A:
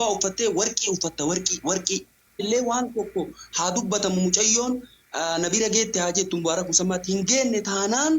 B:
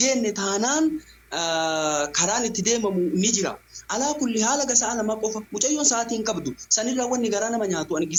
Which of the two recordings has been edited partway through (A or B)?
A